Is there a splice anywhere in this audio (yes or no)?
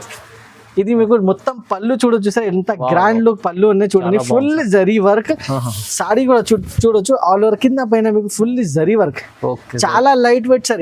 no